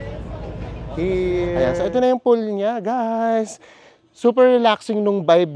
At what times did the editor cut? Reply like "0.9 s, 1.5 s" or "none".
1.6 s

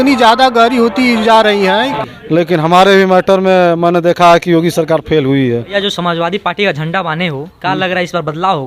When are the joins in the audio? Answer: 2.0 s, 5.7 s

